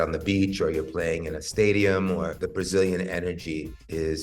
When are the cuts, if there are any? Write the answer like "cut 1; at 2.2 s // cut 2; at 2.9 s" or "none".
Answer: cut 1; at 2.4 s